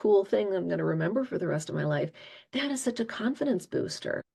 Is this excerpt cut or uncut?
uncut